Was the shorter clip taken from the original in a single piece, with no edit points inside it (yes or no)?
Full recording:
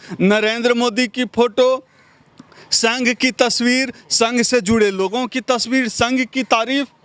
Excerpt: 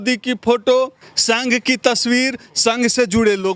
no